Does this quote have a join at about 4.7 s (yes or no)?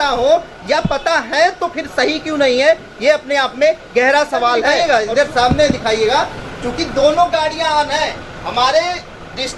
yes